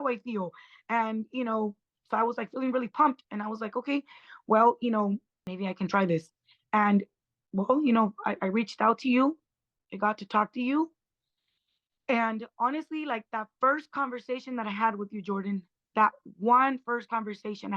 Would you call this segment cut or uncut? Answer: cut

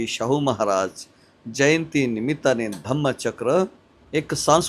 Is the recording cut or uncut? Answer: uncut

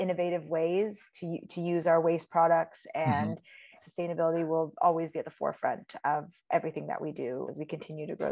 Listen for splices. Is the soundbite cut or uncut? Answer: cut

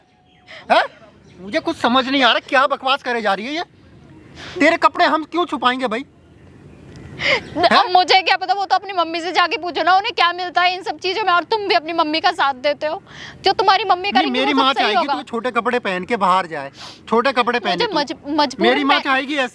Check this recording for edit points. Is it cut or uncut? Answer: uncut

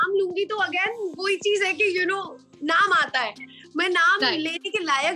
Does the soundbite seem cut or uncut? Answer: uncut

